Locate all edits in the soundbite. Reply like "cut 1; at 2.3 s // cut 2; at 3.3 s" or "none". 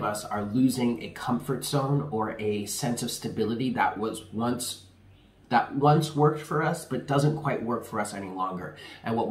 none